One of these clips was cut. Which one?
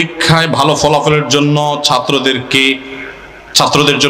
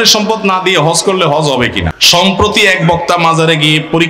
second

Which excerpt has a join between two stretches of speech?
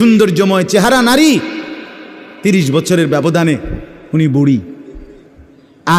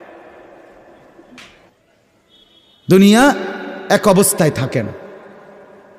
second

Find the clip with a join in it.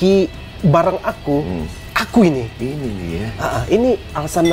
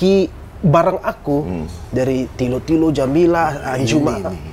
first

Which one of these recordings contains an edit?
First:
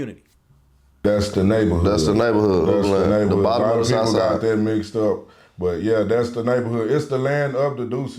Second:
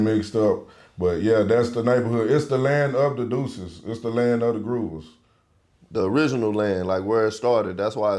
first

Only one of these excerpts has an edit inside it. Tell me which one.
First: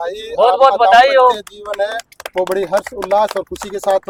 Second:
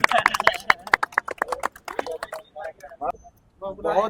second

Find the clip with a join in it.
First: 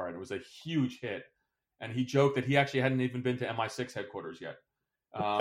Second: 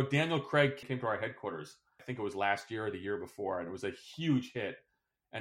second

